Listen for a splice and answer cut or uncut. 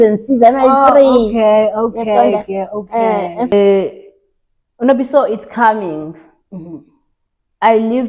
cut